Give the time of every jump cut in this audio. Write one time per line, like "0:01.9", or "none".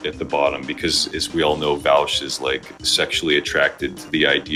none